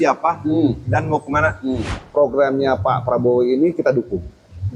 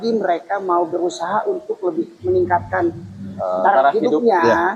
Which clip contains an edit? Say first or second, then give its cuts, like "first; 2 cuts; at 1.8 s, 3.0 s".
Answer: first; 1 cut; at 1.9 s